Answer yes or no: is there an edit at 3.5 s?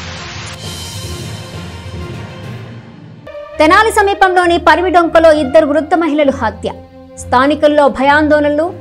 yes